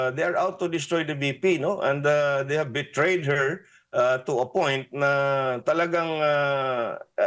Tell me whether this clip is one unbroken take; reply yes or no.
yes